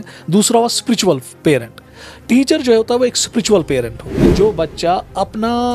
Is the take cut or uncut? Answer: cut